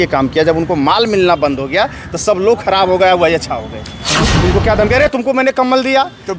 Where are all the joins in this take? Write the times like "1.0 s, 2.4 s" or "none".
4.1 s